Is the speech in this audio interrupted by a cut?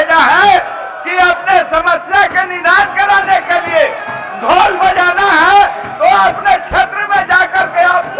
no; 0 cuts

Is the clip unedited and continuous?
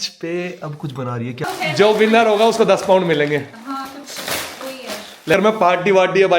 no; 2 cuts; at 1.5 s, 5.3 s

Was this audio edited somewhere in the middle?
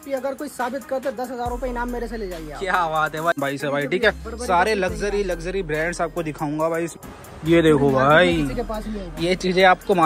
yes; 2 cuts; at 3.4 s, 6.9 s

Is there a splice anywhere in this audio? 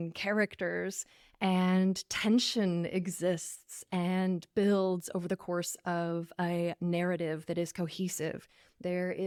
no; 0 cuts

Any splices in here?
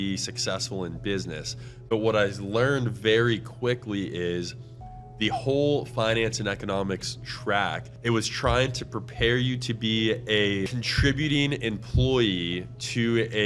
yes; 2 cuts; at 7.9 s, 10.8 s

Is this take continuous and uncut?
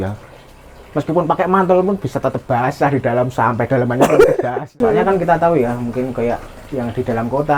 no; 1 cut; at 4.6 s

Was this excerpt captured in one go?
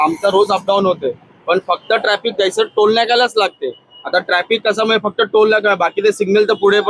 yes; 0 cuts

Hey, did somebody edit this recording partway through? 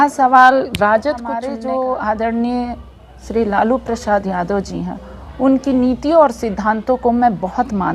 yes; 1 cut; at 1.5 s

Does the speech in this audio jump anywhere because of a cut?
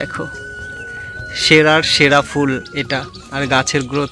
no; 0 cuts

